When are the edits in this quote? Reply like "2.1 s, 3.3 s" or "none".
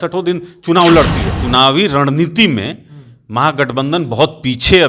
1.3 s